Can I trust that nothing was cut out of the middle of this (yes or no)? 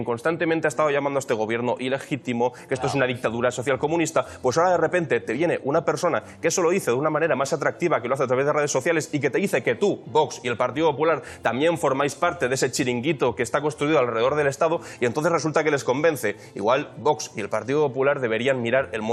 yes